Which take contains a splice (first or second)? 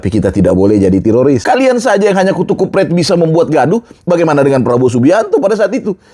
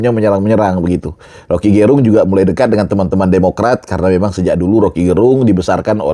first